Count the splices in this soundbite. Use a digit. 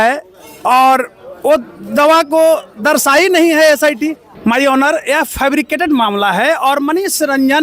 1